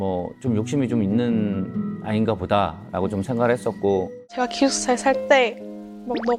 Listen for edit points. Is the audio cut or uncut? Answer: cut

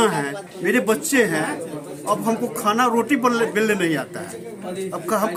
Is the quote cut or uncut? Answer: uncut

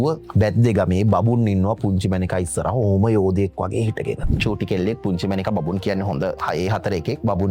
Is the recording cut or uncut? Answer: cut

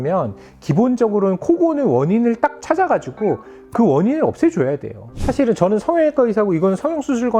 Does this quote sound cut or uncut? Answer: cut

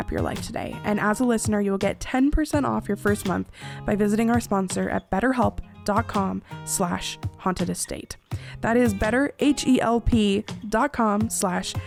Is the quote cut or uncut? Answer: uncut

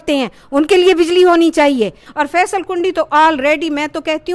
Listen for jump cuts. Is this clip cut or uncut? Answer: cut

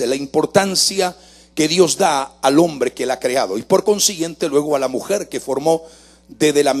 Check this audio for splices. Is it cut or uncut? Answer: uncut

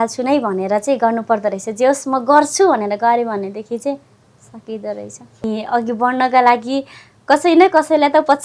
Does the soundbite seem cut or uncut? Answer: cut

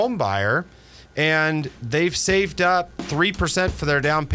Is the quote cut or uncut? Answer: uncut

